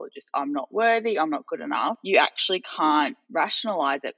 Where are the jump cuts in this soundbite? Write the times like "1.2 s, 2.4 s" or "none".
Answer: 2.0 s, 3.2 s